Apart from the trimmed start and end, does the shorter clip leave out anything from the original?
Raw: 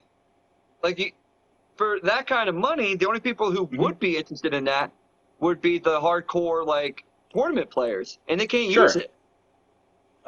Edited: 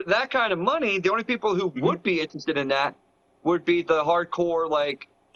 no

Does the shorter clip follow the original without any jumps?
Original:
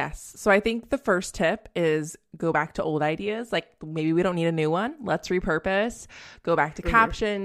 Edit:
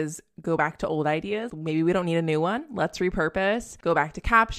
no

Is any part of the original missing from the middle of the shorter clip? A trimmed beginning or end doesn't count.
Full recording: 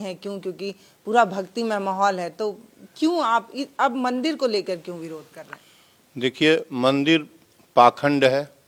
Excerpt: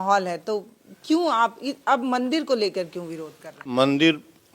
yes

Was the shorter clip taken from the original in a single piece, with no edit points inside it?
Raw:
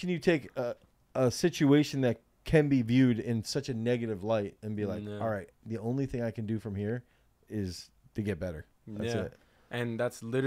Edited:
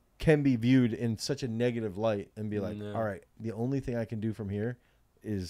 yes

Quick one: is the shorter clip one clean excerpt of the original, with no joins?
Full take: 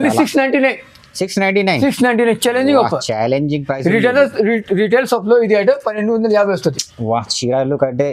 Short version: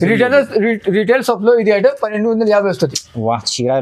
yes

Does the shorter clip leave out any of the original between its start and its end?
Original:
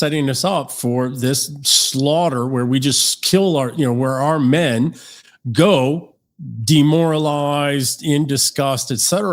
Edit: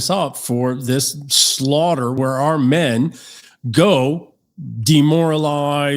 yes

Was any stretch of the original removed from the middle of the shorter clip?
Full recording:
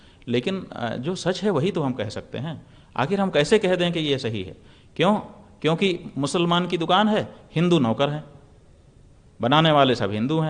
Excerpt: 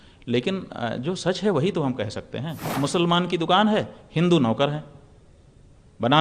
yes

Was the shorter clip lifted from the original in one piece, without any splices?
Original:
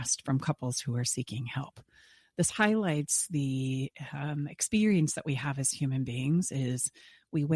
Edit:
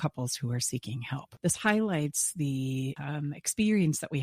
no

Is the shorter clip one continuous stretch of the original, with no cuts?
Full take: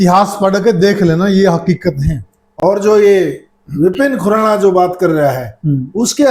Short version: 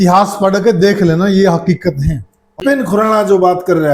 no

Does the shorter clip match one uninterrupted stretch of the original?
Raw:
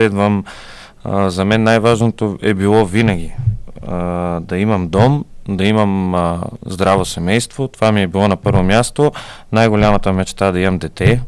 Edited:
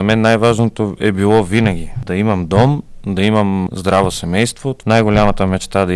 no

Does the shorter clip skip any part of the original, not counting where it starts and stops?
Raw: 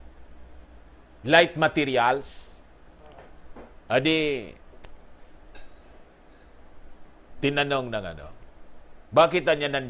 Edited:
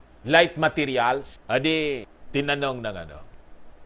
yes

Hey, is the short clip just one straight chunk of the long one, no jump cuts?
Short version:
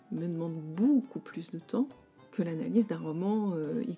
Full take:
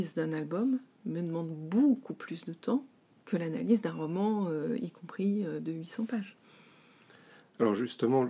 yes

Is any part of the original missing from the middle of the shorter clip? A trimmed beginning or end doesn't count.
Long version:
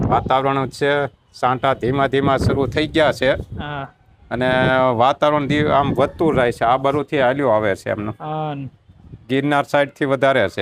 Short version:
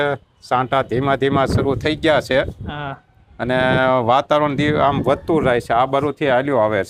no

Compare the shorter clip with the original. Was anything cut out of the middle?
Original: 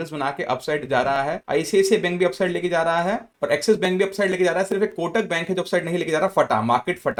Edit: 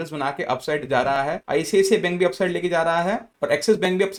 no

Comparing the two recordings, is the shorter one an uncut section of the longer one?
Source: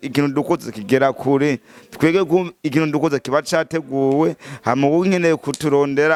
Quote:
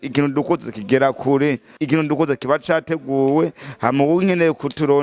no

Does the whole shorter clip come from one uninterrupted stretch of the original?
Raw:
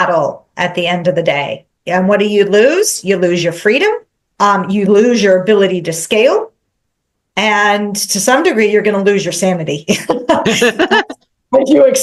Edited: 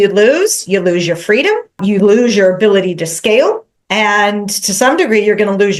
no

